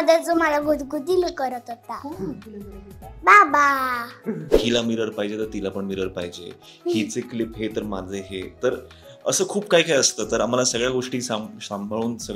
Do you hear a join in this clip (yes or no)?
yes